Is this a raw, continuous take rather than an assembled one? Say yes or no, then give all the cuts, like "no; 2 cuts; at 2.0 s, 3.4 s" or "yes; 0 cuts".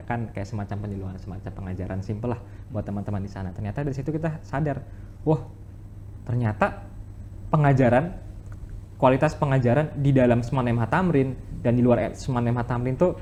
yes; 0 cuts